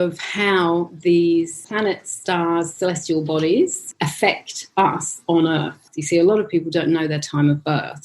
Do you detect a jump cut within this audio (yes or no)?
yes